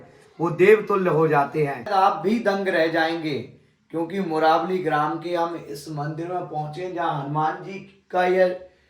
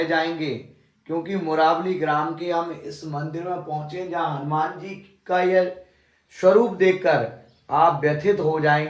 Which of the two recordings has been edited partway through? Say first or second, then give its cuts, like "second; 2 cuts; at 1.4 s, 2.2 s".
first; 1 cut; at 1.9 s